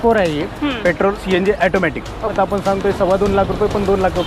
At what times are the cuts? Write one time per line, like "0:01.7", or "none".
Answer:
0:01.2
0:02.3